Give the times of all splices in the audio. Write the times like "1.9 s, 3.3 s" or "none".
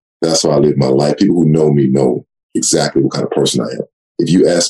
none